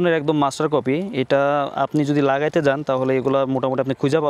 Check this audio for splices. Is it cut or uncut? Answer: uncut